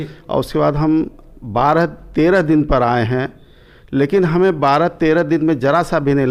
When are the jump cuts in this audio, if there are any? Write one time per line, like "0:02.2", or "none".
none